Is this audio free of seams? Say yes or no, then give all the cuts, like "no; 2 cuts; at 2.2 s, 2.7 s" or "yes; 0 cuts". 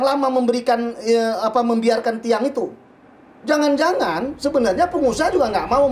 yes; 0 cuts